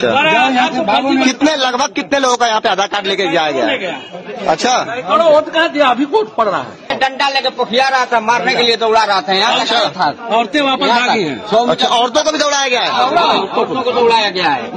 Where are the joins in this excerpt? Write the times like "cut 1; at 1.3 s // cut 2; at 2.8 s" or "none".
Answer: cut 1; at 6.9 s